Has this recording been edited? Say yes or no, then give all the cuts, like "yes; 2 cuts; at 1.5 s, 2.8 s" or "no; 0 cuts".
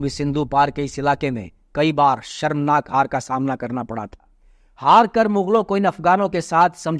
no; 0 cuts